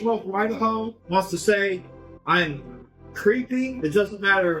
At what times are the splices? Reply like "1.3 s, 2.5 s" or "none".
0.9 s, 3.7 s